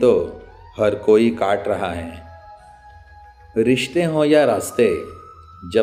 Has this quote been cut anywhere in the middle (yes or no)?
no